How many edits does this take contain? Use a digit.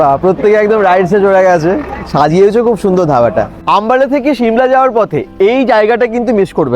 1